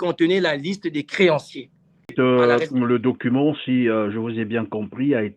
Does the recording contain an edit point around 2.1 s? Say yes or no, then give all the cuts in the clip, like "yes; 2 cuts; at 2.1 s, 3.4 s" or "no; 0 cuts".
yes; 1 cut; at 2.1 s